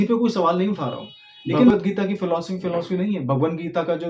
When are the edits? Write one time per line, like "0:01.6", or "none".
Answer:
0:01.7